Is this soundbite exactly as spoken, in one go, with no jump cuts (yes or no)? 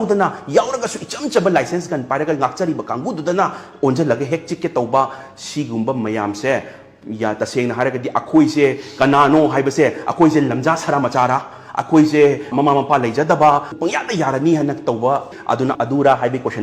yes